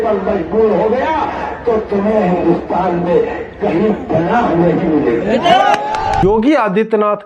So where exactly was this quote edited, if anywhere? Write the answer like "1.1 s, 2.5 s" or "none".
6.2 s